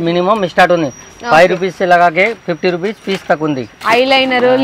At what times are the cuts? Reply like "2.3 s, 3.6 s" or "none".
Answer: 3.7 s